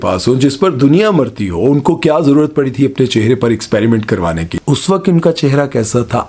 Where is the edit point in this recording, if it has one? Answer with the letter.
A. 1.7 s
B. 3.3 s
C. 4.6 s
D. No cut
C